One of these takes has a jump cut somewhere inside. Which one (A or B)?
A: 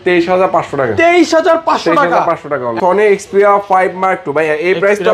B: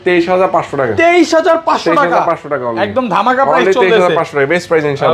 A